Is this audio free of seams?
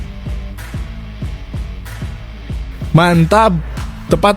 no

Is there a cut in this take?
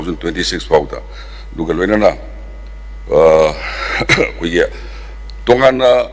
no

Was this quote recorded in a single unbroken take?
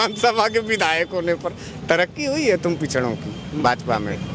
yes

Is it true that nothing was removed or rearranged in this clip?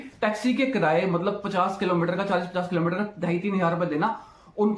yes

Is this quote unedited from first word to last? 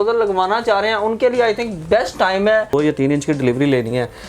no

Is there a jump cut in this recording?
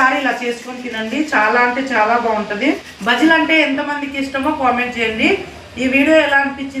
yes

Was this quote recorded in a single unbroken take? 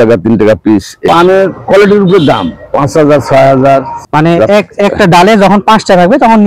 no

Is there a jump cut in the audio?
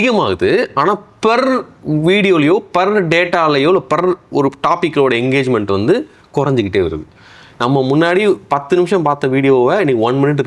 no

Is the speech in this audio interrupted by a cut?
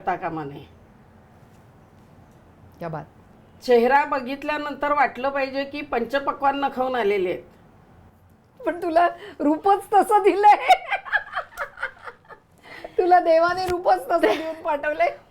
no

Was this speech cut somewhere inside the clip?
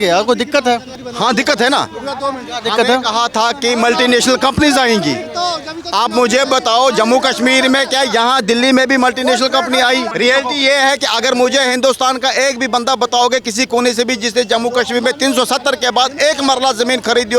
yes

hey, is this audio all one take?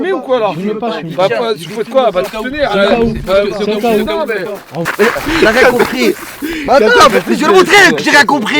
no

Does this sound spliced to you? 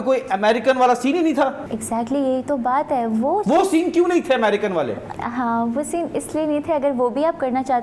no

